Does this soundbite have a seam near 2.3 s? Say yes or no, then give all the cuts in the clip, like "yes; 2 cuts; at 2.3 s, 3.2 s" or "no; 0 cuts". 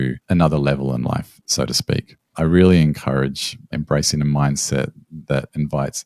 yes; 1 cut; at 2.3 s